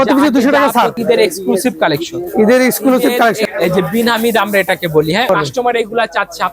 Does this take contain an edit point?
yes; 3 cuts; at 0.9 s, 3.4 s, 5.3 s

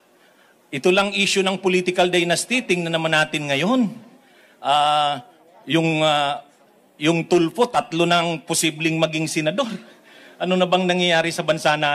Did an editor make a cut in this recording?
no; 0 cuts

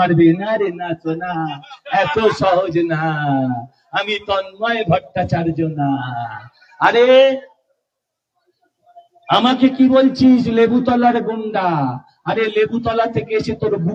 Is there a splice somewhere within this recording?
no; 0 cuts

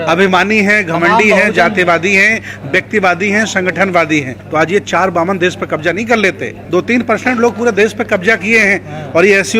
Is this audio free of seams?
no; 2 cuts; at 4.4 s, 6.5 s

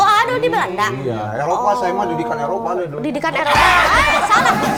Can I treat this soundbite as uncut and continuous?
yes; 0 cuts

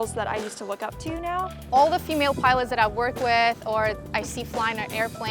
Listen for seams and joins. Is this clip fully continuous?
no; 1 cut; at 1.6 s

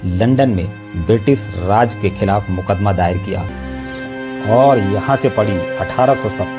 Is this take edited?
yes; 1 cut; at 3.6 s

